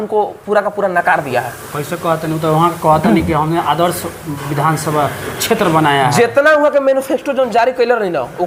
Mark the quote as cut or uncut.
uncut